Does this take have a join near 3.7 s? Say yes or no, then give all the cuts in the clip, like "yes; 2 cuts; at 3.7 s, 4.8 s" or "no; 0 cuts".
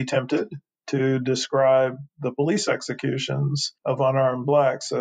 yes; 1 cut; at 3.7 s